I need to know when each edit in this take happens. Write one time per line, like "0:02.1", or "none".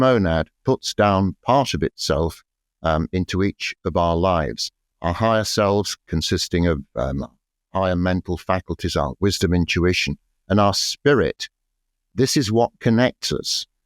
0:04.9
0:12.1